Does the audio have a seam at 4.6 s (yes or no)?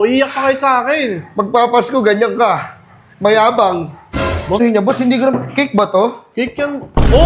yes